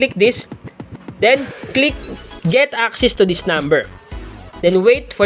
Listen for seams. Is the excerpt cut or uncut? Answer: uncut